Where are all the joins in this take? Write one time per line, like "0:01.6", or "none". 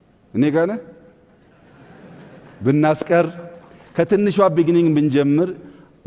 none